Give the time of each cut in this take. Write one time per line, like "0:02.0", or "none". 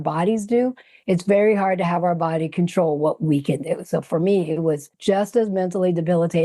0:04.9